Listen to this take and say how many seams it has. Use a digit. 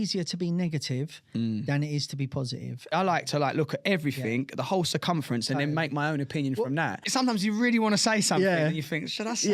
2